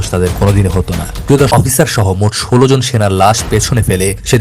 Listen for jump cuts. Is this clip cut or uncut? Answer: cut